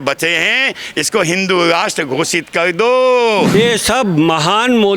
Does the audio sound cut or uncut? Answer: cut